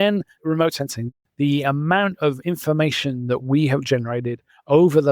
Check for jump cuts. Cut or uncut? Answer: cut